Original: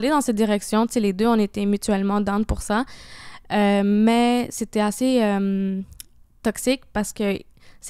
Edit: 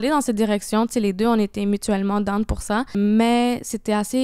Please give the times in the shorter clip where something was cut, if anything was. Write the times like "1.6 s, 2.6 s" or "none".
3.0 s